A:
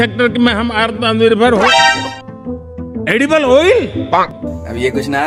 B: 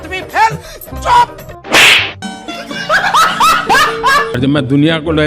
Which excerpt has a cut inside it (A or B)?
B